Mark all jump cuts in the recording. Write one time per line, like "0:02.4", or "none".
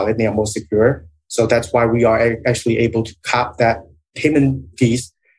0:04.0